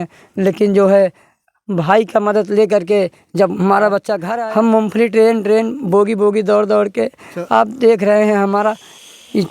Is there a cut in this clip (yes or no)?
yes